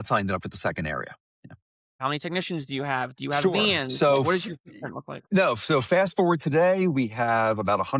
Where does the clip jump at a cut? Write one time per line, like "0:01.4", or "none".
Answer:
0:02.0